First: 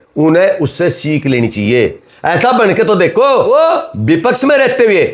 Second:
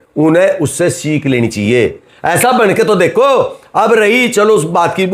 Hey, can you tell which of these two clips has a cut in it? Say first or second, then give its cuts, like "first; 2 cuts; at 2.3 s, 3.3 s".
first; 1 cut; at 3.5 s